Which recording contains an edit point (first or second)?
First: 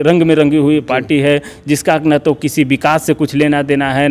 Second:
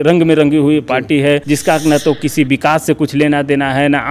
second